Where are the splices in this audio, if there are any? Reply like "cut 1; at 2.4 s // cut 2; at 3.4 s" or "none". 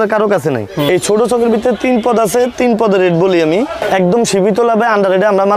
cut 1; at 0.9 s // cut 2; at 3.8 s